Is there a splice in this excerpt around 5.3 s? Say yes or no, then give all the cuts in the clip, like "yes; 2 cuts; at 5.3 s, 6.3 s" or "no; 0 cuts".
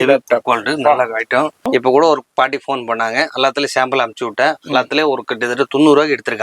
no; 1 cut; at 1.7 s